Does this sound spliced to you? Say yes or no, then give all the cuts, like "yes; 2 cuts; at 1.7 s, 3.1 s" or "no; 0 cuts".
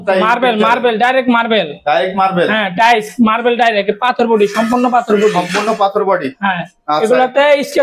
no; 0 cuts